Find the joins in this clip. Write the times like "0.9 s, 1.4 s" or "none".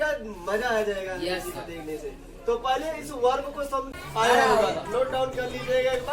3.9 s